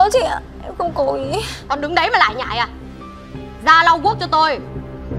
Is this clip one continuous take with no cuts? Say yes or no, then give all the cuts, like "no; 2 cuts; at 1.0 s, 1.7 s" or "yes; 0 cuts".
yes; 0 cuts